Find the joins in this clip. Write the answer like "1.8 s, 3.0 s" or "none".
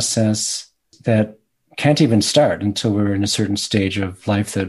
0.9 s